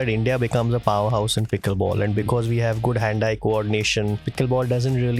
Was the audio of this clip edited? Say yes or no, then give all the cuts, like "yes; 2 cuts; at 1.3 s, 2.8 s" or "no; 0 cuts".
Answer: yes; 1 cut; at 4.3 s